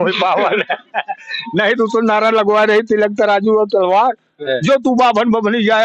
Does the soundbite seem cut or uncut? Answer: cut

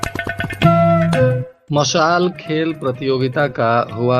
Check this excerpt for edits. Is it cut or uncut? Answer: cut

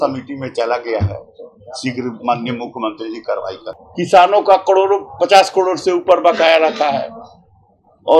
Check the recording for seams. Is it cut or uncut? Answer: cut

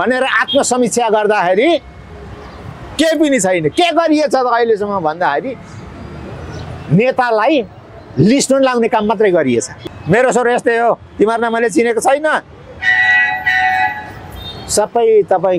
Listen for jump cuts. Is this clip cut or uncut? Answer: cut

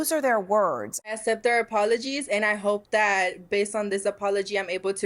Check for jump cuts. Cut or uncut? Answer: cut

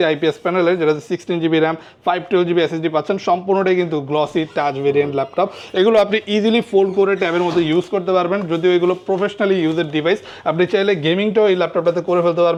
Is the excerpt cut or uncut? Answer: uncut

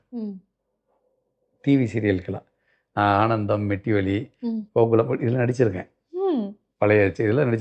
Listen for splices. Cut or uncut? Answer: uncut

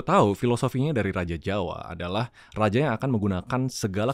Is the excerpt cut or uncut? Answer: uncut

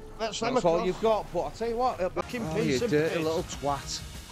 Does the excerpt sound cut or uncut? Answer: cut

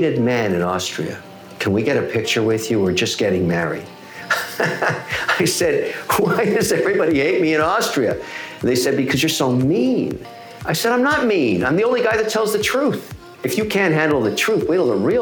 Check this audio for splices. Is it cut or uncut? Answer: uncut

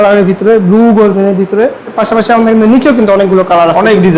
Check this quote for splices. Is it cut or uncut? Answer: cut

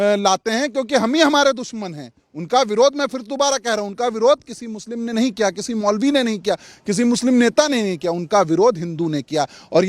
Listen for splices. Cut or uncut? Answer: uncut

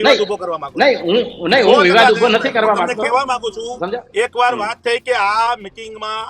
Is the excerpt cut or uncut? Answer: uncut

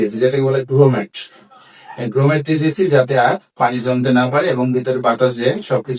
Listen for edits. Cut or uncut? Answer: uncut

